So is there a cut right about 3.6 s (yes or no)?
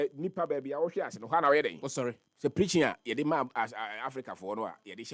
no